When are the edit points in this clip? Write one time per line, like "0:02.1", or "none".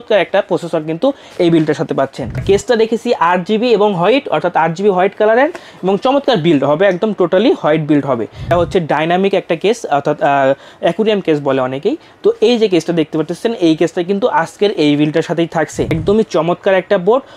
0:02.4
0:08.5
0:15.9